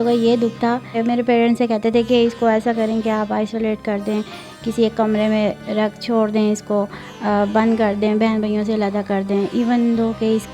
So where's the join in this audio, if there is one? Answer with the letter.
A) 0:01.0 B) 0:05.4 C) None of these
A